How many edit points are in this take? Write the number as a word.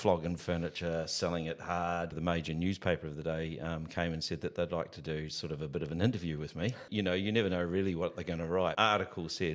three